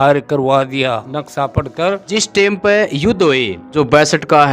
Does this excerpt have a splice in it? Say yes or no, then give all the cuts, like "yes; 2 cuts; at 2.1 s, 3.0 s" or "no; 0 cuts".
yes; 3 cuts; at 1.1 s, 2.0 s, 3.6 s